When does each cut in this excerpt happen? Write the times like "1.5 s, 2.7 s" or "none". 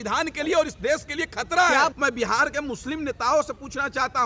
1.9 s